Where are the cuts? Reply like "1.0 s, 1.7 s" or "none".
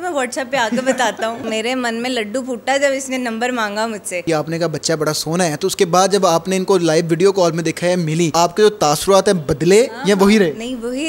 1.4 s, 4.2 s, 8.3 s